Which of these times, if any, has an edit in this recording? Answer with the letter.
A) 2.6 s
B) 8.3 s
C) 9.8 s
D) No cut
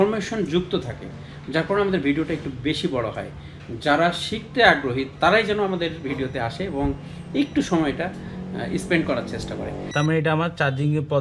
C